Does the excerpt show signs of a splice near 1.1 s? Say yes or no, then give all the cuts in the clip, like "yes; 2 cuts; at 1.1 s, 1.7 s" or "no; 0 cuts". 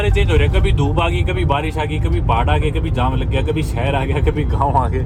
no; 0 cuts